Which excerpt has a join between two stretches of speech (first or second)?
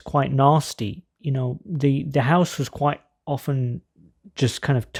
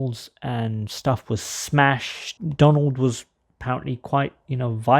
second